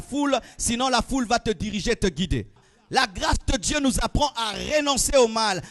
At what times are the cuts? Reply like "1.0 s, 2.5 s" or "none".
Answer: 2.6 s